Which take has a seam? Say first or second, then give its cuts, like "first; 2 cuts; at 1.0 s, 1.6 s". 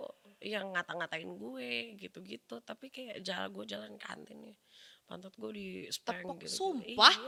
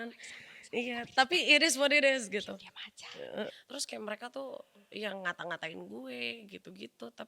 second; 1 cut; at 3.6 s